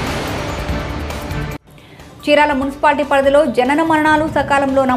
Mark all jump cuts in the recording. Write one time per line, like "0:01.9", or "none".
0:01.6